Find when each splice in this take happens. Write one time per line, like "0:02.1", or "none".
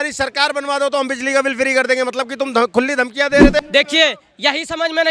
0:03.6